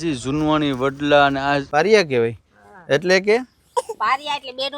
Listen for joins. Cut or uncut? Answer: cut